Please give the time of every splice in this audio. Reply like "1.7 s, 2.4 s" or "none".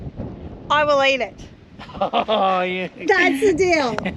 none